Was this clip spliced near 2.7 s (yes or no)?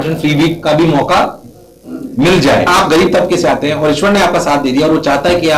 yes